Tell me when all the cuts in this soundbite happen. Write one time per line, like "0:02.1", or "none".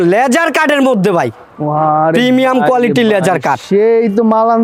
none